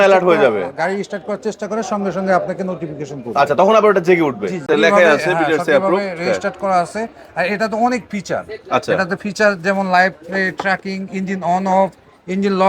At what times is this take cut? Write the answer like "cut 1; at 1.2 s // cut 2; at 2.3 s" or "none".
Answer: cut 1; at 4.7 s